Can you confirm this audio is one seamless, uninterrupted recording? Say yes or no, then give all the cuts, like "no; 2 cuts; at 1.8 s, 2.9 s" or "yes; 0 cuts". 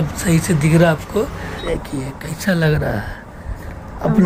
no; 1 cut; at 1.5 s